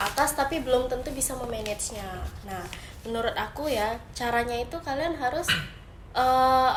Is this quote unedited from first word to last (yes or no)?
yes